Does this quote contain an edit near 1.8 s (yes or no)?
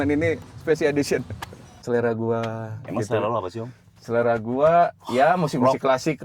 yes